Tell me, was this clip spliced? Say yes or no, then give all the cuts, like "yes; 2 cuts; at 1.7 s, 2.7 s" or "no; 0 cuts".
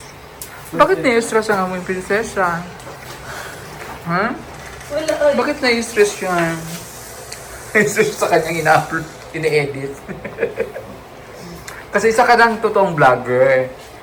no; 0 cuts